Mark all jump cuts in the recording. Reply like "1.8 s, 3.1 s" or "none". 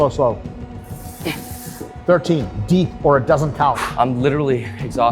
3.8 s